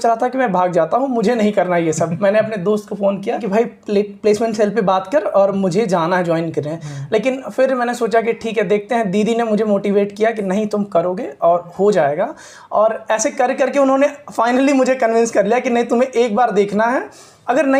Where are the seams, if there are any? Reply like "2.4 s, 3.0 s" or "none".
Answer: none